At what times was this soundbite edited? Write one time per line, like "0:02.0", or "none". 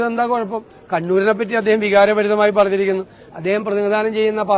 none